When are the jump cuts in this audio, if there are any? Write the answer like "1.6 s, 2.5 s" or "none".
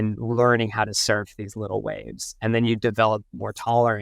none